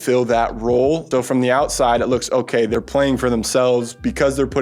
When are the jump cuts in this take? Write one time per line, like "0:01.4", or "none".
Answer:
0:01.0
0:02.7